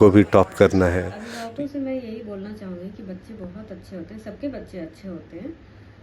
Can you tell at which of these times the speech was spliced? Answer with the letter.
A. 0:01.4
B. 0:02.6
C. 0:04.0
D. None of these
A